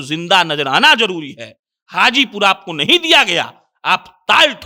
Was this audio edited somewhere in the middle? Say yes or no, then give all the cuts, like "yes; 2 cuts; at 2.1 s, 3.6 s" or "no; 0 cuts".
no; 0 cuts